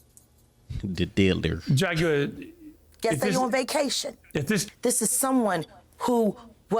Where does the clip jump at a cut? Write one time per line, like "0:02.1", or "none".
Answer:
0:04.6